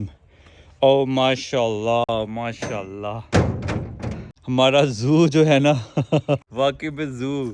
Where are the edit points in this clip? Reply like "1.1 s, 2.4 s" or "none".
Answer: none